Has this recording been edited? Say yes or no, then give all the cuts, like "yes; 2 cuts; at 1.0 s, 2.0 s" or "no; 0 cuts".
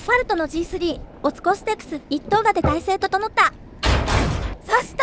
yes; 2 cuts; at 1.1 s, 4.1 s